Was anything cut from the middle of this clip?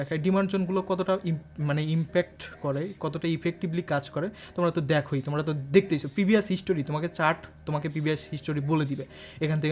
no; 0 cuts

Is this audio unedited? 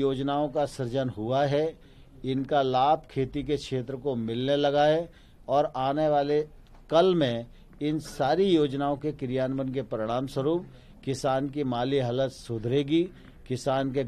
yes; 0 cuts

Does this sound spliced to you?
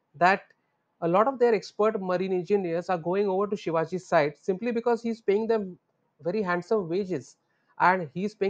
no; 0 cuts

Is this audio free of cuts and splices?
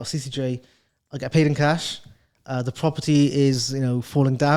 yes; 0 cuts

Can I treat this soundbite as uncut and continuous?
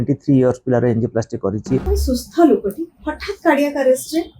no; 1 cut; at 1.9 s

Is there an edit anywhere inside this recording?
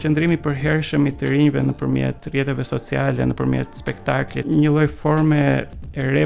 yes; 1 cut; at 4.4 s

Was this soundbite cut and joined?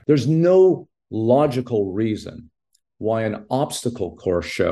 no; 0 cuts

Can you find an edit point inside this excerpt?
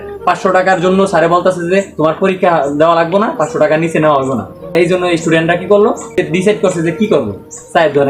yes; 2 cuts; at 4.7 s, 6.2 s

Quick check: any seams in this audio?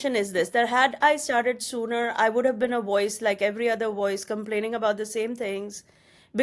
no; 0 cuts

